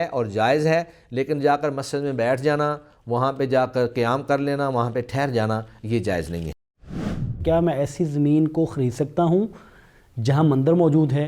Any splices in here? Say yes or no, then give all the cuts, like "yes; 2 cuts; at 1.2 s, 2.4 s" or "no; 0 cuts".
yes; 1 cut; at 6.9 s